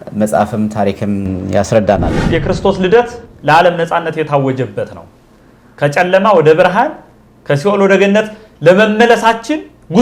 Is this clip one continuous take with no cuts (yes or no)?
no